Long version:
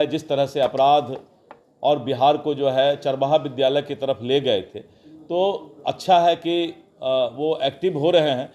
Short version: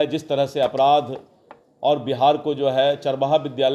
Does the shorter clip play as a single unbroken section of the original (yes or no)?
yes